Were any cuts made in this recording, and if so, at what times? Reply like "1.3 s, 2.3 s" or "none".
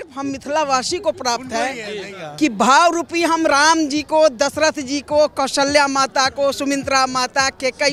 none